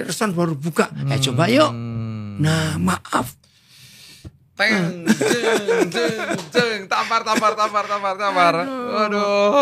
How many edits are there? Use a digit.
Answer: 0